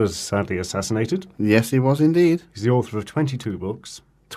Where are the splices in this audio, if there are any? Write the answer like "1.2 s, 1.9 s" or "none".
2.6 s